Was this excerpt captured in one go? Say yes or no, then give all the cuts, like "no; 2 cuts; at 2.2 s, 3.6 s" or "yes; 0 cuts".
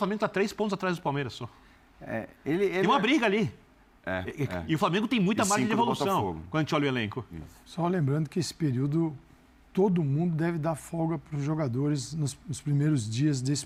yes; 0 cuts